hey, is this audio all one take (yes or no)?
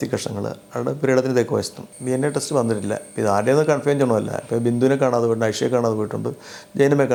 yes